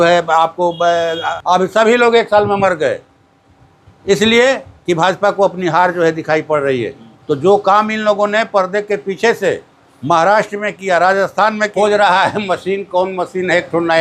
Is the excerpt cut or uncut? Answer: cut